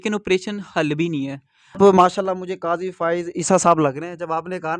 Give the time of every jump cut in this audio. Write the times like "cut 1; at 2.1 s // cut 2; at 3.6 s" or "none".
cut 1; at 1.8 s